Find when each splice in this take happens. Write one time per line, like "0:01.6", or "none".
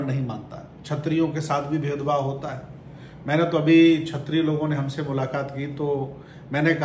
none

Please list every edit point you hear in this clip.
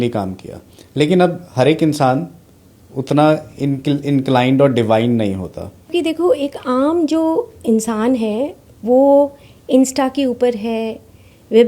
0:05.9

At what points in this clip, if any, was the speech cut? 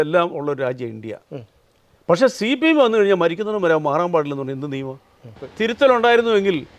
0:05.5

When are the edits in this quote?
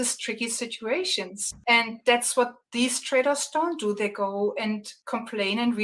0:01.4
0:02.6
0:04.9

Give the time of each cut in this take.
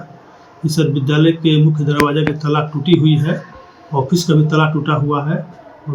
none

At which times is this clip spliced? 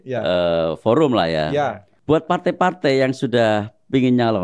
0:01.9

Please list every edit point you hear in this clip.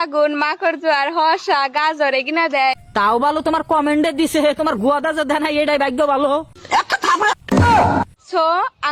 none

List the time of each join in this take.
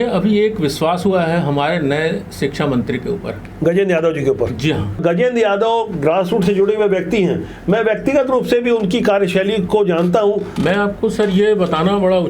0:05.0
0:10.5

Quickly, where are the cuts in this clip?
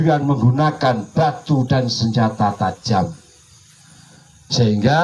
none

